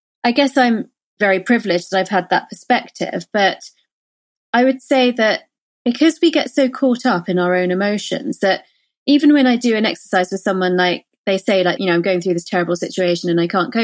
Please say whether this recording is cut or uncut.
cut